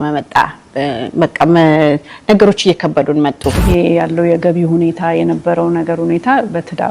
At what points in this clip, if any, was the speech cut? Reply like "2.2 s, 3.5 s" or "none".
3.6 s

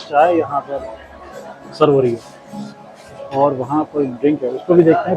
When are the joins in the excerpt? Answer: none

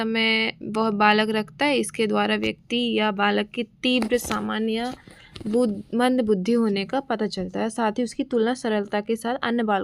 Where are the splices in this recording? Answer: none

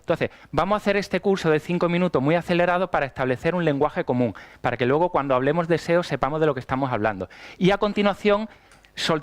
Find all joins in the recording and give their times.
4.4 s

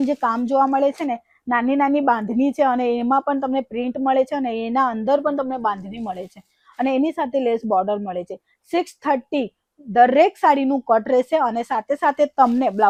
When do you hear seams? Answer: none

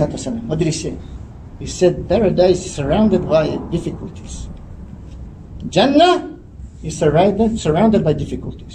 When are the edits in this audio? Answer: none

